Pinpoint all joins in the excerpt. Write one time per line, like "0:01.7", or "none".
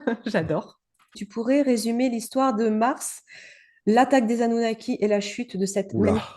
0:01.1